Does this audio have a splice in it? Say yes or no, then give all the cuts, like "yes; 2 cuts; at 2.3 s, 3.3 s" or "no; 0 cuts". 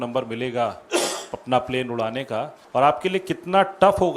yes; 1 cut; at 2.6 s